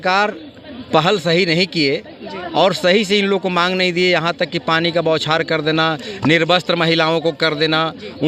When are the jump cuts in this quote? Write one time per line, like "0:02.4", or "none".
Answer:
none